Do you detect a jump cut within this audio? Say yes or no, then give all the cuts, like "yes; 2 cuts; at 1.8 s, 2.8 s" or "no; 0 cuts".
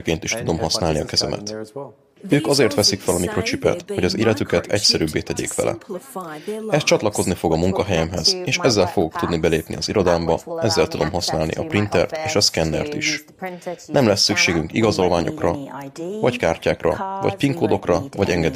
no; 0 cuts